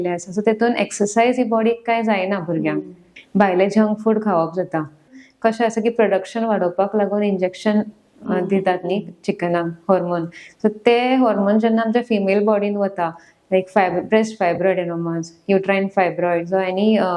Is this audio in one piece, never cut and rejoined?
no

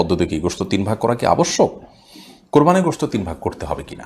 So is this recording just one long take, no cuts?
yes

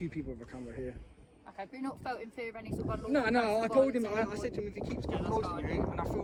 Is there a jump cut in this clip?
no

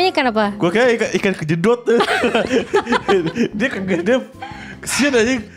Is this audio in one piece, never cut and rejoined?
yes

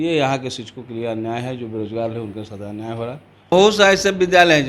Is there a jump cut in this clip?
yes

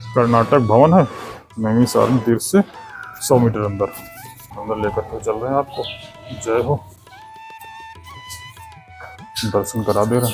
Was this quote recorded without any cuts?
no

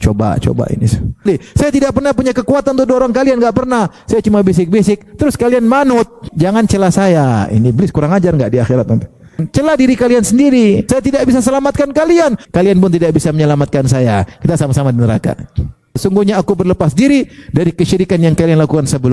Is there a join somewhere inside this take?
yes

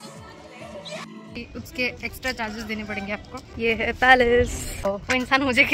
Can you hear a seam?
yes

